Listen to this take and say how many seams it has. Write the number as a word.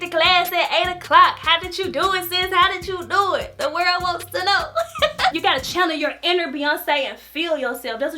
one